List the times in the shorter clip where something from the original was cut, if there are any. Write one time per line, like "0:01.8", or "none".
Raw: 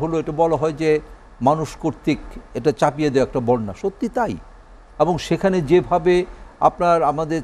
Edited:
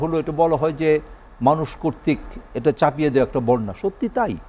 none